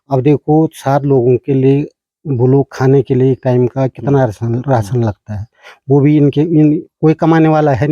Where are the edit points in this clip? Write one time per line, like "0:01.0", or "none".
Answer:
none